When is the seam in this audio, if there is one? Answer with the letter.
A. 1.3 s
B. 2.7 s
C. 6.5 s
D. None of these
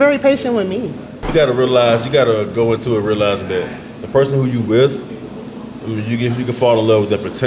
A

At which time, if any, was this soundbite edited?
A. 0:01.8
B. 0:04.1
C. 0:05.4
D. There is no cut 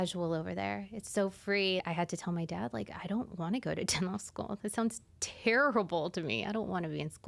A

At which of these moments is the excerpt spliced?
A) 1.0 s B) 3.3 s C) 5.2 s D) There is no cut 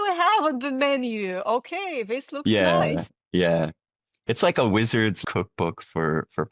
C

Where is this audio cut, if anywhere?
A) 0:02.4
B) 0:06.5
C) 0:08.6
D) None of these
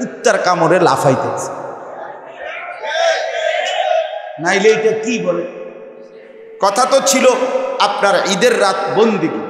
B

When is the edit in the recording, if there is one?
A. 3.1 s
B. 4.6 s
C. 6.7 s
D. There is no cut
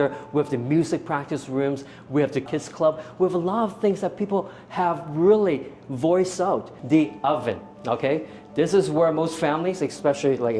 C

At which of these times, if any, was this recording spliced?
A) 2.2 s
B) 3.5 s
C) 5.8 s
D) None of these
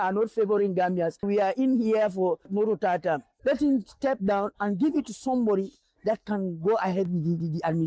D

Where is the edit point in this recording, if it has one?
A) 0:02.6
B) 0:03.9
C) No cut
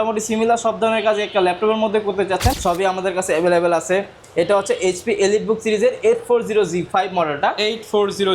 A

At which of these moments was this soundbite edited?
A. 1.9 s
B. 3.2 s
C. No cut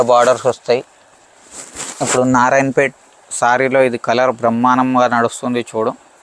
C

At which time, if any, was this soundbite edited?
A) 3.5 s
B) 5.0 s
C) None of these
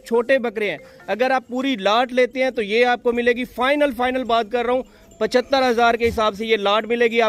C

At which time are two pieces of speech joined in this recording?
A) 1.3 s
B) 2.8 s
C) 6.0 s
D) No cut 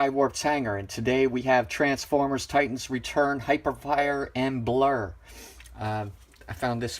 B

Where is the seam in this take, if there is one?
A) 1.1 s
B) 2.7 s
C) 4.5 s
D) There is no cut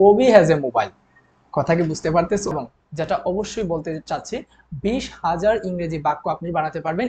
B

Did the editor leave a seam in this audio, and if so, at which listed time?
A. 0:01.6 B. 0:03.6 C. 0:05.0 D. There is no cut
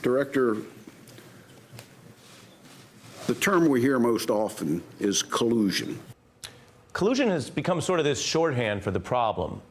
C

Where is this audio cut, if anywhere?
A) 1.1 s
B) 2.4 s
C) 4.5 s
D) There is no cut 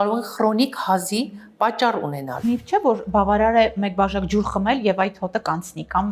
B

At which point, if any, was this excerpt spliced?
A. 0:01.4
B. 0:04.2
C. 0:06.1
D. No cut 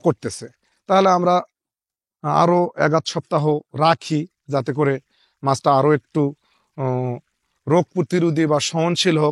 D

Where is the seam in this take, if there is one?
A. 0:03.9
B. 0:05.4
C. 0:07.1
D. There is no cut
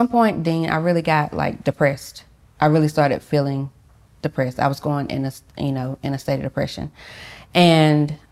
D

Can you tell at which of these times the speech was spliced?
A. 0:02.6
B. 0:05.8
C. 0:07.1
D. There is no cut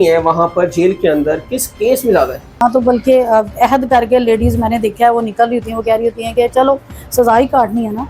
A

